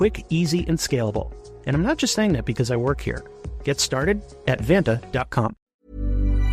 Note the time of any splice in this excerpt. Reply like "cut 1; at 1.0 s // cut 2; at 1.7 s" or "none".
cut 1; at 5.6 s